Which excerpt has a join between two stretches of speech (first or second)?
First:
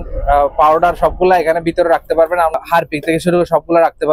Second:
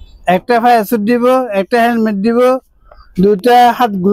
first